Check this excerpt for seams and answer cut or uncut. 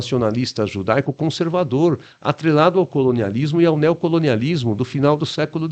uncut